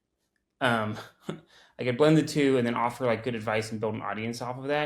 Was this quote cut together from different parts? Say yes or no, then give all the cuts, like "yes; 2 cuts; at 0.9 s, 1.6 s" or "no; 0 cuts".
no; 0 cuts